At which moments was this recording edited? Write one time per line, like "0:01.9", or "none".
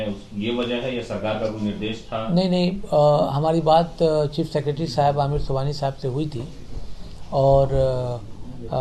none